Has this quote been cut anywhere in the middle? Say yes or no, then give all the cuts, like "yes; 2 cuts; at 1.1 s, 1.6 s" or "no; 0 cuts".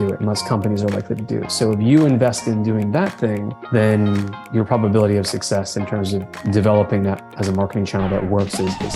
no; 0 cuts